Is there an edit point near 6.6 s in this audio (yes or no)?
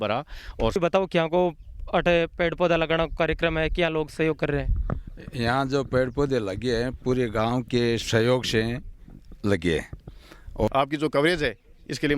no